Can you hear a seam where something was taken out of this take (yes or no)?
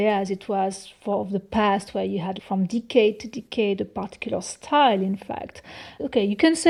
no